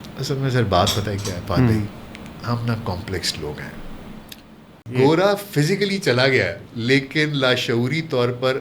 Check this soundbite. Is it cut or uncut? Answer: cut